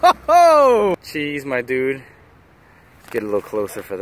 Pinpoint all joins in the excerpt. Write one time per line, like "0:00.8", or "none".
0:01.0